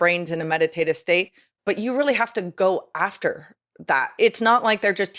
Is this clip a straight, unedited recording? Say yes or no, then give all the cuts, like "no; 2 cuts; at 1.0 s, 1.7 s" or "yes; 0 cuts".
no; 1 cut; at 4.2 s